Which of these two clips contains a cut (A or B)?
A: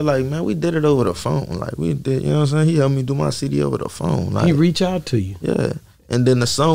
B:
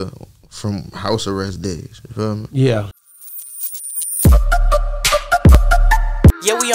B